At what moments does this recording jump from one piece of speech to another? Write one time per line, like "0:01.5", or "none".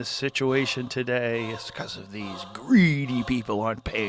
none